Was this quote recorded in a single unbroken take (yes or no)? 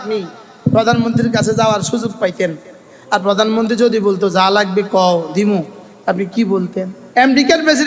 no